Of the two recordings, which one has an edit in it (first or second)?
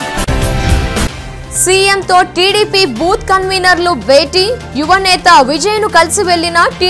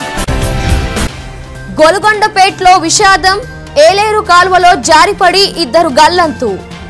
first